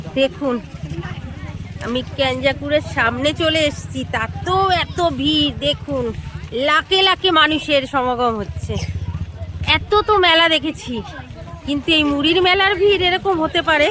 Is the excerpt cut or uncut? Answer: uncut